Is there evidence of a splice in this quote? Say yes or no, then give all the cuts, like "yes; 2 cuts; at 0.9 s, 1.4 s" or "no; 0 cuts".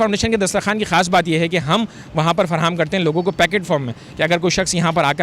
no; 0 cuts